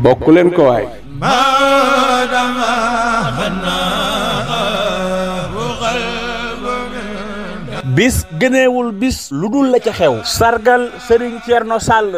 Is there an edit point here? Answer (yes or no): yes